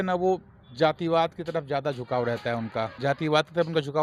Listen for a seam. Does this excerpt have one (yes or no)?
no